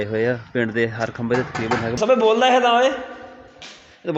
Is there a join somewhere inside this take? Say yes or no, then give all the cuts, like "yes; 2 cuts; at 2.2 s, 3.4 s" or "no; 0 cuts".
yes; 1 cut; at 2.0 s